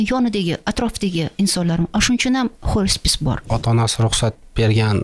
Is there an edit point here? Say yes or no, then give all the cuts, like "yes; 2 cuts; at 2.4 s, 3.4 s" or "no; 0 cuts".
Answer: yes; 1 cut; at 3.4 s